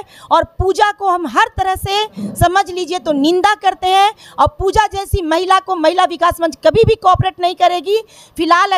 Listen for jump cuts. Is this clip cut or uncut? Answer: uncut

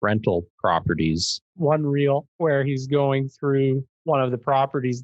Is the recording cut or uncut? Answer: cut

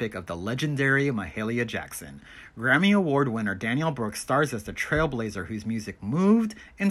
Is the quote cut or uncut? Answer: uncut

